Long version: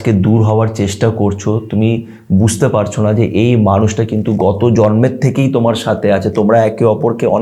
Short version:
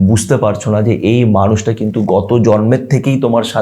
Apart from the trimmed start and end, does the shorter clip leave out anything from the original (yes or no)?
no